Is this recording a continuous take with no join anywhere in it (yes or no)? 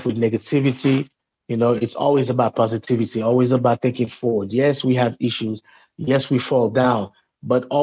yes